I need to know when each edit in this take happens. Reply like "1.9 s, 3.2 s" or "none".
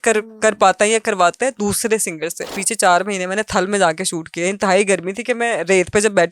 2.6 s